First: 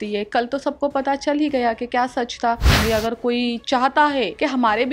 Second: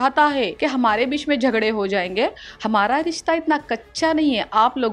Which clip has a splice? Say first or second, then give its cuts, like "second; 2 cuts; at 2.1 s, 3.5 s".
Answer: first; 1 cut; at 2.8 s